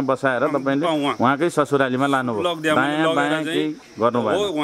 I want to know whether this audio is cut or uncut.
uncut